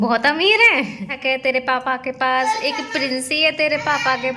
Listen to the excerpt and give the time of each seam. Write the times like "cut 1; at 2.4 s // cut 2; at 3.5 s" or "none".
cut 1; at 1.1 s